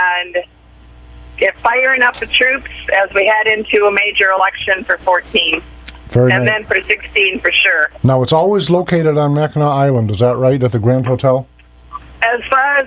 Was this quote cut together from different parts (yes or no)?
no